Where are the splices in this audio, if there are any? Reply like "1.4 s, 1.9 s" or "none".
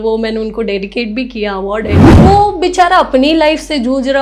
2.2 s